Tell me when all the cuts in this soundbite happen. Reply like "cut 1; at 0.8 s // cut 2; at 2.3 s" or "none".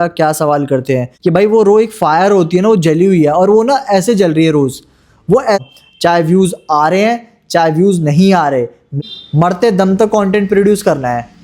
cut 1; at 1.1 s // cut 2; at 5.6 s // cut 3; at 9.0 s